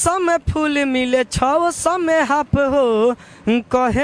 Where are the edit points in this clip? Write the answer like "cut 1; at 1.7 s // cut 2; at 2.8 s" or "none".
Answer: none